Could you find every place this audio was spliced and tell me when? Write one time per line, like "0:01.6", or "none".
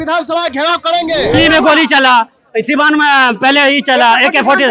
0:01.4